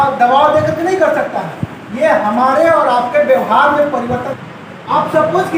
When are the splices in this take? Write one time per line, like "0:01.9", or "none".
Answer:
0:04.3